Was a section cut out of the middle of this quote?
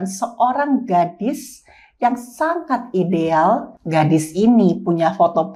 yes; 1 cut; at 3.8 s

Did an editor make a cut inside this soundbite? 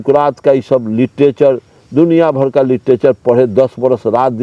no; 0 cuts

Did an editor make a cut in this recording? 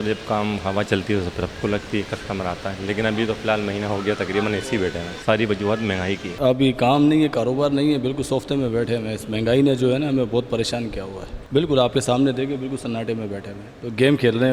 yes; 3 cuts; at 5.2 s, 6.3 s, 11.4 s

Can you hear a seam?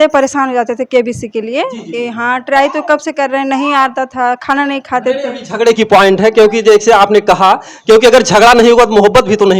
no; 0 cuts

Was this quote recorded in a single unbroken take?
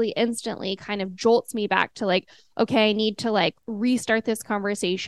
no; 1 cut; at 3.6 s

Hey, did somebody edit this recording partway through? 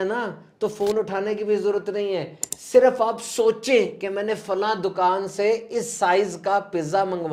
no; 0 cuts

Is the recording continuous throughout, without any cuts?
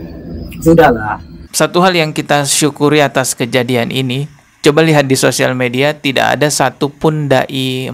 no; 1 cut; at 1.5 s

